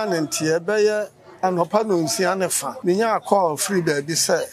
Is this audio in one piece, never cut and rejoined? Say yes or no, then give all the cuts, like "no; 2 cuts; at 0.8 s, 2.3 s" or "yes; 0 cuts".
no; 1 cut; at 2.7 s